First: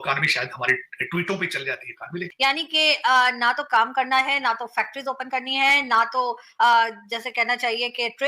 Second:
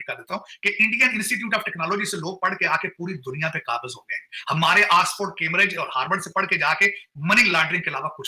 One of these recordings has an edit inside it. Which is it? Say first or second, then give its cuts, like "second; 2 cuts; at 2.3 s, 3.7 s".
first; 1 cut; at 2.3 s